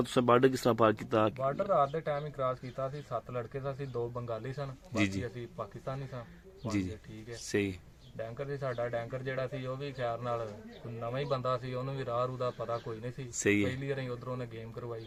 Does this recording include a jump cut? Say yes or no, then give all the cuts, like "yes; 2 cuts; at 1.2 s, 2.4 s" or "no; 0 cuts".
no; 0 cuts